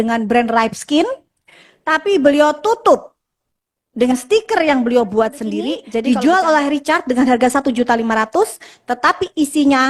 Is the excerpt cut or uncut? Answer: cut